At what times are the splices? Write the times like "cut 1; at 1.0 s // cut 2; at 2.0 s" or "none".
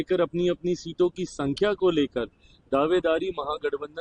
none